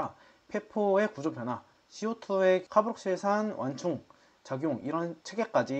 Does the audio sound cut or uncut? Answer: cut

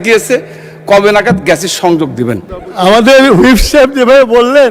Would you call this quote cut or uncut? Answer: cut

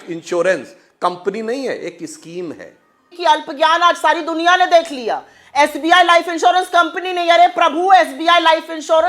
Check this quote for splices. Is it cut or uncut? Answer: cut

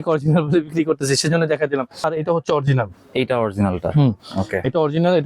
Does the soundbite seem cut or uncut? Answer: cut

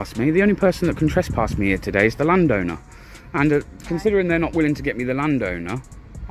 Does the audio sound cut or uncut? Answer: uncut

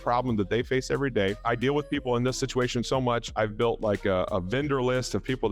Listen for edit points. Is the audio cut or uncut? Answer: cut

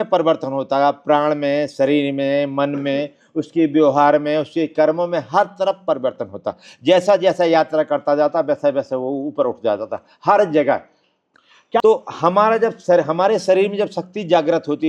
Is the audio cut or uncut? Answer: cut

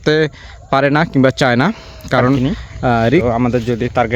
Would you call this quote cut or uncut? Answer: cut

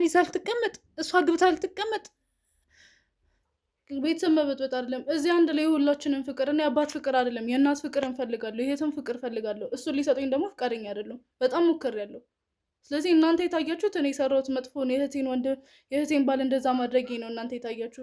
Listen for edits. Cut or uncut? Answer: cut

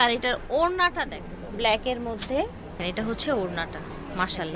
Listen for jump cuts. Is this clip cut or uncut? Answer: cut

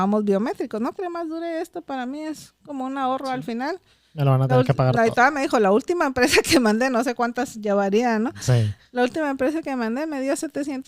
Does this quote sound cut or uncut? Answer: cut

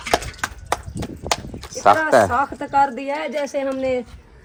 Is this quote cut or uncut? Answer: uncut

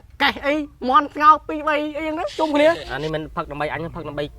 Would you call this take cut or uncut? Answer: cut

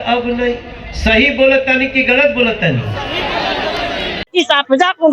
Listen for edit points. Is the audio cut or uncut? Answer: cut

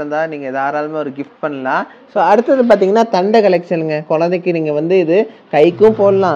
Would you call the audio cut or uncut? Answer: cut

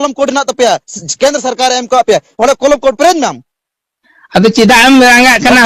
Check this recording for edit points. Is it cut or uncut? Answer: uncut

